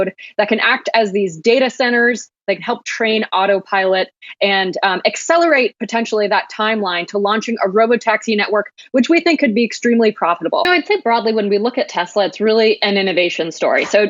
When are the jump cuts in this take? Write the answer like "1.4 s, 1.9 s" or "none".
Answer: 10.7 s